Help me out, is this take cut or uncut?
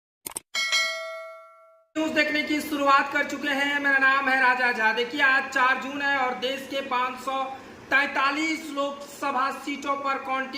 cut